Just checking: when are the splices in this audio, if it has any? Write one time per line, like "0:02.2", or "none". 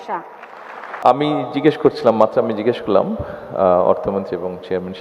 0:01.0